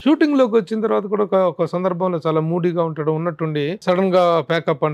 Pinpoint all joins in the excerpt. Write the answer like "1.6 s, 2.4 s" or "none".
3.8 s